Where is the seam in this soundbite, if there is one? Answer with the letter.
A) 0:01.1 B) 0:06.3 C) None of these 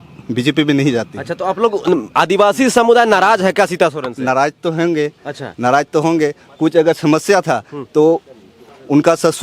C